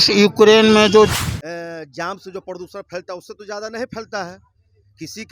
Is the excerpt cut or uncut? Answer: cut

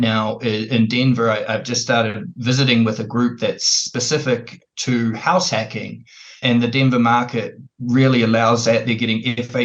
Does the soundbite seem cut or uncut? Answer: cut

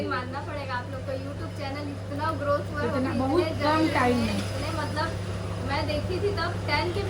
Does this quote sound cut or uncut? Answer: uncut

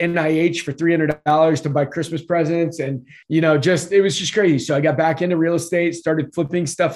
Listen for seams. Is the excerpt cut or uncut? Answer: cut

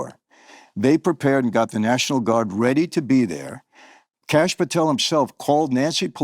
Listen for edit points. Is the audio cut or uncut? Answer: uncut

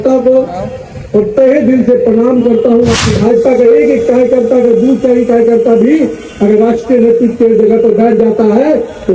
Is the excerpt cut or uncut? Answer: cut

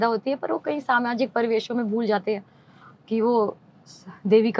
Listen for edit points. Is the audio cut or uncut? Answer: uncut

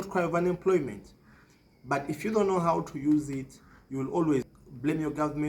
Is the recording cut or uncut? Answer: cut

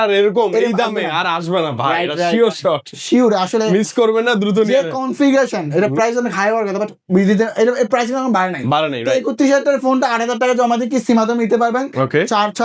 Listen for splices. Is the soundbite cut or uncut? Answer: uncut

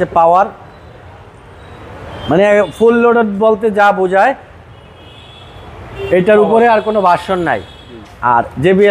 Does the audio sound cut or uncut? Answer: uncut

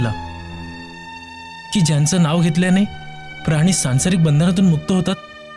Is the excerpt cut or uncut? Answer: uncut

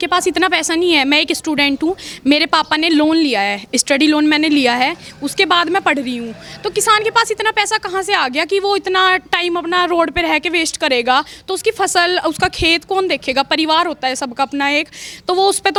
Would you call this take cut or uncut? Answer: uncut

